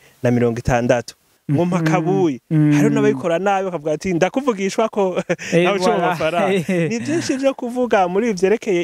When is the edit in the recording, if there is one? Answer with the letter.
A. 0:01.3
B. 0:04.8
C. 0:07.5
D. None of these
A